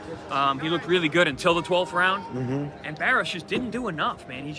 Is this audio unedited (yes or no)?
yes